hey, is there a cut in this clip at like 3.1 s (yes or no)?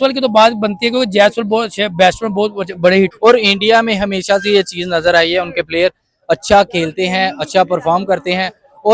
yes